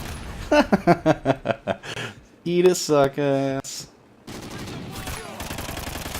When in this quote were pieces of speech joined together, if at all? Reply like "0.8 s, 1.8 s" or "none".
4.3 s